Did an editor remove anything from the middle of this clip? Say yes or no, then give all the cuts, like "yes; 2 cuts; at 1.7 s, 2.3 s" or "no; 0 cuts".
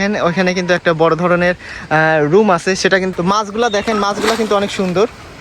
yes; 1 cut; at 3.1 s